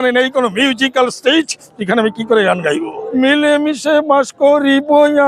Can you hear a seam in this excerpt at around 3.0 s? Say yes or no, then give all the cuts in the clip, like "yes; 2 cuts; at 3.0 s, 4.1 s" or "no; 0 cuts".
yes; 1 cut; at 3.0 s